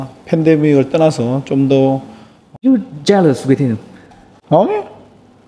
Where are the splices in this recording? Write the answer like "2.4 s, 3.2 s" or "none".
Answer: 2.7 s